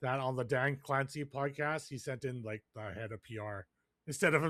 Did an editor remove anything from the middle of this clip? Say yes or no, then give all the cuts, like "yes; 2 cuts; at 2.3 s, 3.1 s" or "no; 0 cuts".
no; 0 cuts